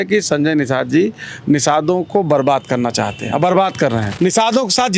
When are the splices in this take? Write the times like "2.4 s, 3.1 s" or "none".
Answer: 4.1 s